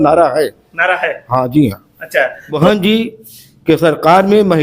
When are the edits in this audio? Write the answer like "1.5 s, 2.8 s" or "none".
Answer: 2.5 s